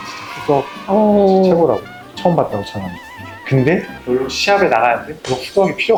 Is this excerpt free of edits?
yes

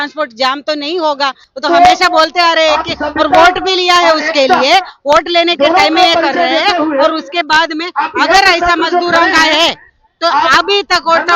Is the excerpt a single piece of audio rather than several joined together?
no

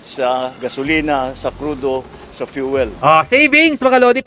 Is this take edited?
yes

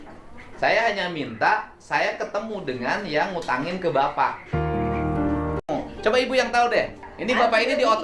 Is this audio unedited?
no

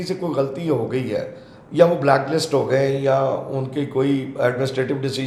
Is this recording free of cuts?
yes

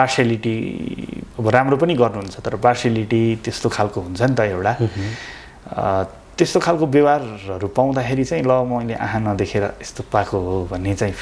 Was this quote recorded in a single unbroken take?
yes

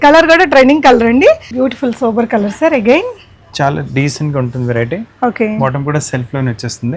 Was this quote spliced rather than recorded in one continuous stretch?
yes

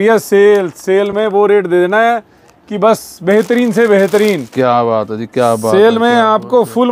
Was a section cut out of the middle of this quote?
no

